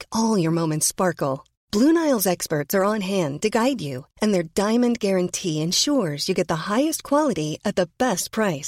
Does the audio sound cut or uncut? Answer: uncut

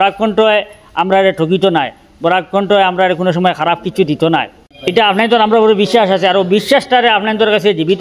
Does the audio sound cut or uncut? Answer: cut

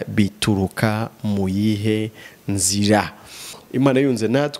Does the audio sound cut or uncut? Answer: cut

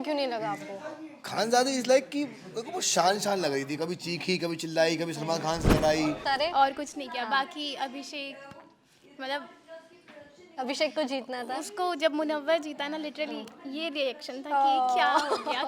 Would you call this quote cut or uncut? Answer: cut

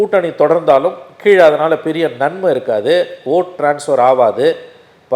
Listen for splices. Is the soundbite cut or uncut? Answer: uncut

